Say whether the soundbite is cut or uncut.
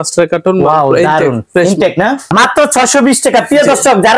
cut